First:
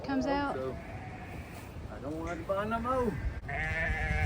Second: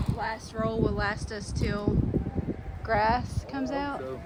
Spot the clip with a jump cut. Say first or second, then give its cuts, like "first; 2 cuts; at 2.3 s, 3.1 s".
first; 1 cut; at 3.3 s